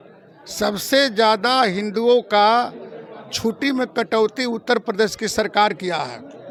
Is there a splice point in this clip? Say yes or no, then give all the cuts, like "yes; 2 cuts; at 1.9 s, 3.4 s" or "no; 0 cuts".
no; 0 cuts